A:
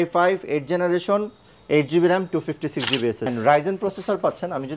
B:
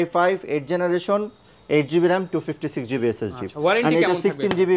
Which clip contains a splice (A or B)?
A